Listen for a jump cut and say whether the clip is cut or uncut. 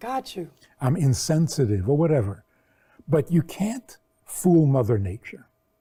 uncut